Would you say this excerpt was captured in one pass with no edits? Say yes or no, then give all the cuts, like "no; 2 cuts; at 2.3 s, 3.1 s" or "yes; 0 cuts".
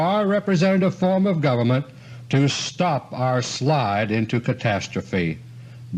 yes; 0 cuts